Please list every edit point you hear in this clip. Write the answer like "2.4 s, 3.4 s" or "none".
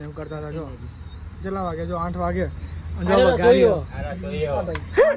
none

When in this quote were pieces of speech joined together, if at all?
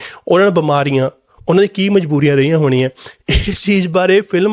none

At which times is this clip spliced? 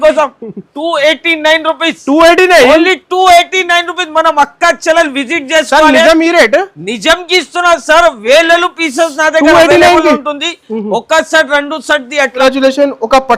12.4 s

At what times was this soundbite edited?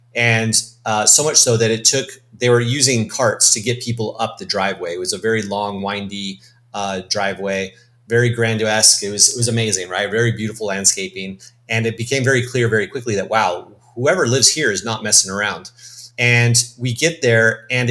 none

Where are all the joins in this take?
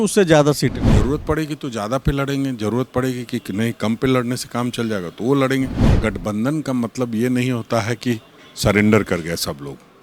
0.8 s, 5.8 s

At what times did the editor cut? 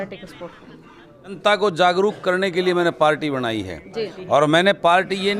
1.3 s

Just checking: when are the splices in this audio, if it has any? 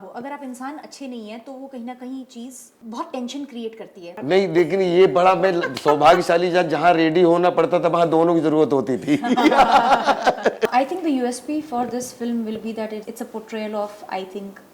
4.1 s, 10.6 s, 13.1 s

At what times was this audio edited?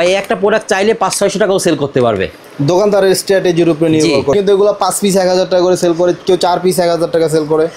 4.3 s

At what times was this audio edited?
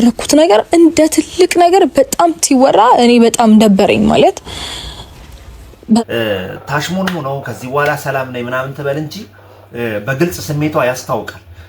6.0 s

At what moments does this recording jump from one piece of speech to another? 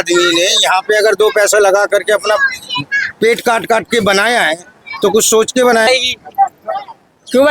5.9 s

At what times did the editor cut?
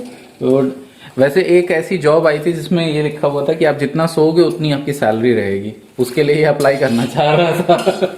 none

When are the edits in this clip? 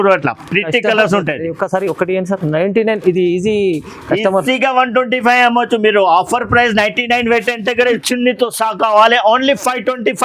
8.0 s

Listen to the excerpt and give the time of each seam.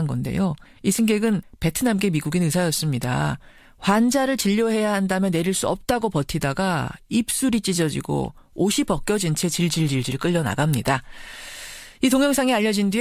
none

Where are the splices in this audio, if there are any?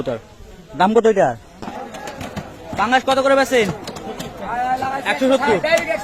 1.6 s

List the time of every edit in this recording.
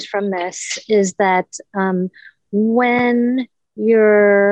none

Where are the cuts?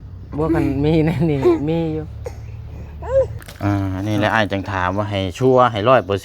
3.4 s

